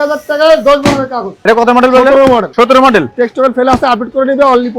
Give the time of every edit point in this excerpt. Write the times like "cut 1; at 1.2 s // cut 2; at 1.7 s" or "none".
cut 1; at 1.3 s // cut 2; at 2.5 s